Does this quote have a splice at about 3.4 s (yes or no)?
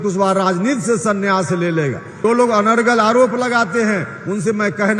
no